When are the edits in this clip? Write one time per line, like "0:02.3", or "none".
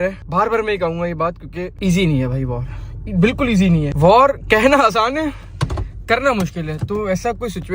none